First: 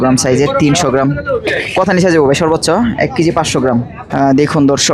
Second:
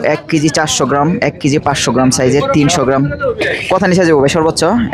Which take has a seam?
first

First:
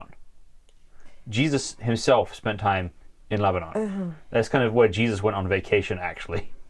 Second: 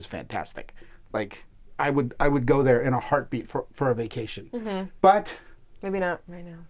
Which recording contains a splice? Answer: second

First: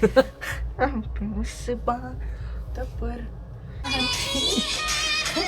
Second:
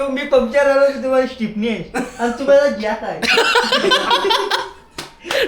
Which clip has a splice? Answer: first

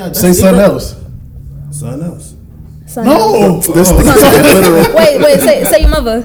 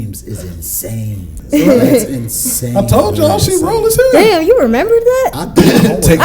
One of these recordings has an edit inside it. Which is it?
second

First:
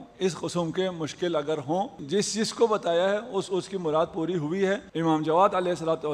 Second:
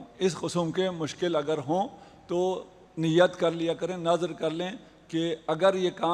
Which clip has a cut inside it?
first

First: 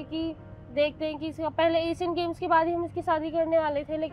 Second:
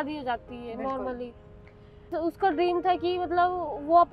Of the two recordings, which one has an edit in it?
second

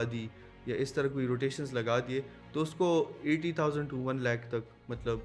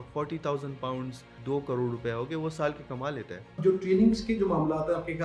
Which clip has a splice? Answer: second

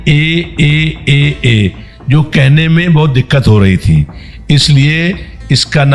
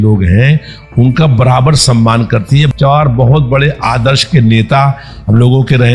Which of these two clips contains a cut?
second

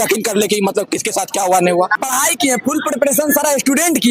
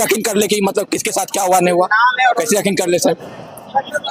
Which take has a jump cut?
first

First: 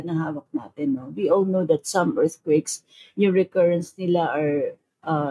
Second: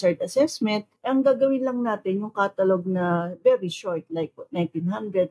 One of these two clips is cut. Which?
second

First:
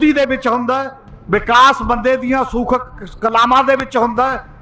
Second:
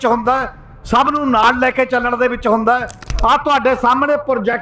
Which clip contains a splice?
second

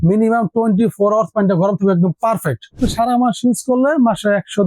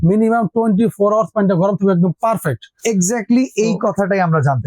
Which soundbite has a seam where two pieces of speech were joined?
first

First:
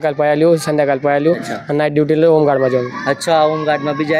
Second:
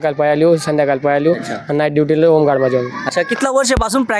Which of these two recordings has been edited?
second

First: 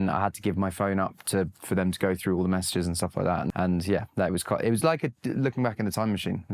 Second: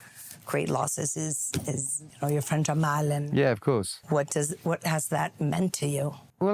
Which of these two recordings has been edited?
first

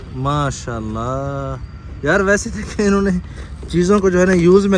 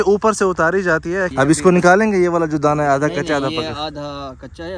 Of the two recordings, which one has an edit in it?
second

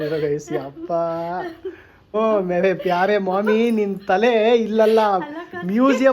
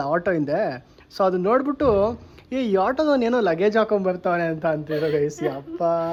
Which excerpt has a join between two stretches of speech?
first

